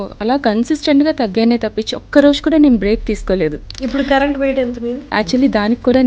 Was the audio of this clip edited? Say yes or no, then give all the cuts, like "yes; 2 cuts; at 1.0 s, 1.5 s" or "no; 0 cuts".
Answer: yes; 2 cuts; at 3.7 s, 5.0 s